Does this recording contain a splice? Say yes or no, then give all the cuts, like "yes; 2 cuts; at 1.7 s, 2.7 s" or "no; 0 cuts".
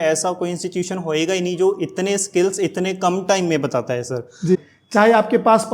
yes; 1 cut; at 4.6 s